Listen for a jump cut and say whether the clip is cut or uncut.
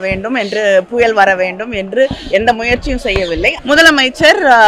cut